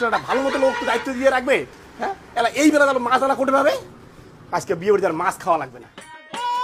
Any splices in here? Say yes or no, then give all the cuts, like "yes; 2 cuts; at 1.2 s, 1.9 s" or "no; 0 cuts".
no; 0 cuts